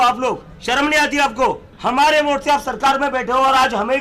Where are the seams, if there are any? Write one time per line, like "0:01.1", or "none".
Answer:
0:01.7